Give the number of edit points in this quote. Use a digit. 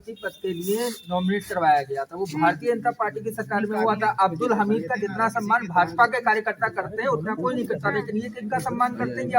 0